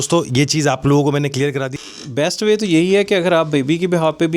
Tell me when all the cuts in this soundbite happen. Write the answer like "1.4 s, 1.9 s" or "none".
1.7 s